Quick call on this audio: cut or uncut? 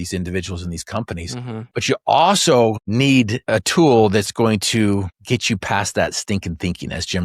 cut